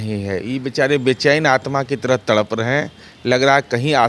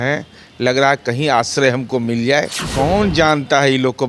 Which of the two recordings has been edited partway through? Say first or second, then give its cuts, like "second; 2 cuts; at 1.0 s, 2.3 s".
second; 1 cut; at 2.6 s